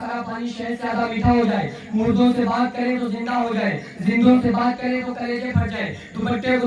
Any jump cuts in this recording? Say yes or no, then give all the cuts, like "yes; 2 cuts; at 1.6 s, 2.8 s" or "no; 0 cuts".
no; 0 cuts